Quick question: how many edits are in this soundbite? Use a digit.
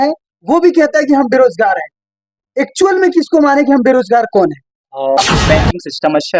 1